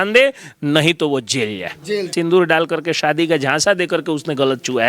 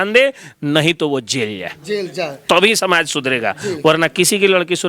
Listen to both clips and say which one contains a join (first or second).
first